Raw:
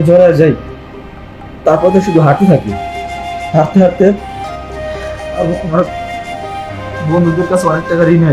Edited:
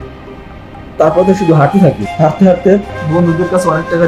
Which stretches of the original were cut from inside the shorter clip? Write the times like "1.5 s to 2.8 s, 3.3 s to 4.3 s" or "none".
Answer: 2.7 s to 3.4 s, 4.3 s to 6.9 s

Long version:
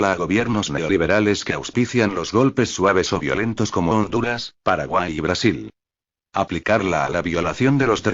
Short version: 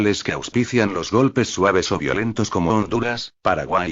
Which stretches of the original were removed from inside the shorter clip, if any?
none

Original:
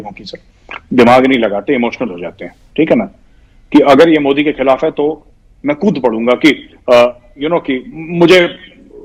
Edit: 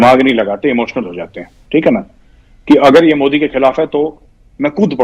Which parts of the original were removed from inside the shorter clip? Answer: none

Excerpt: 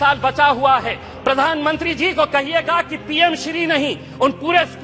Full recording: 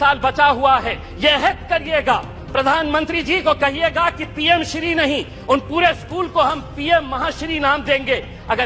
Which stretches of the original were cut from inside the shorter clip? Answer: 1.1 s to 2.3 s

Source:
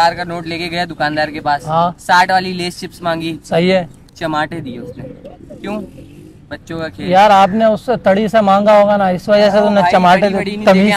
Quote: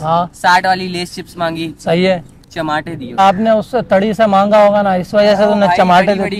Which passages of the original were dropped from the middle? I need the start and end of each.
4.8 s to 7.3 s

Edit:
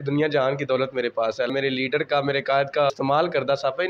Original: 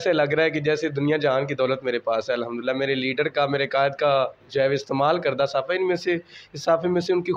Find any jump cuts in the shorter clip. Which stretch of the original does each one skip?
2.4 s to 2.8 s, 4.2 s to 4.8 s

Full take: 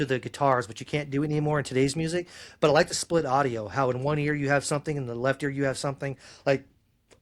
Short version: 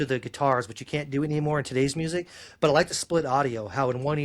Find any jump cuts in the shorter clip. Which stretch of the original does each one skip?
none

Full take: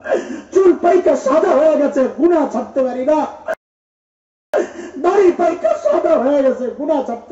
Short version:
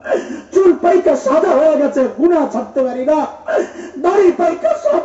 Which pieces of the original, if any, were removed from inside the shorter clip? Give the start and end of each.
3.4 s to 4.4 s

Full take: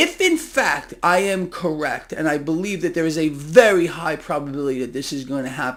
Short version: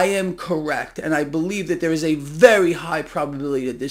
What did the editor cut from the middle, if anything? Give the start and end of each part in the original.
none

